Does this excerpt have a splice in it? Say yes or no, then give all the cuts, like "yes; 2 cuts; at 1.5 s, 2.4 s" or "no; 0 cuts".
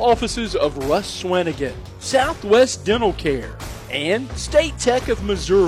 no; 0 cuts